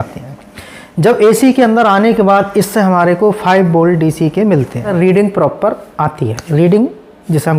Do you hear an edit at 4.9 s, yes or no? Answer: yes